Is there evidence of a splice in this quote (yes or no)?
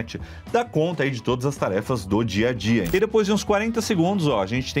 yes